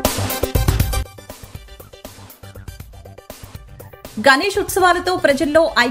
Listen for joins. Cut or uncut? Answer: cut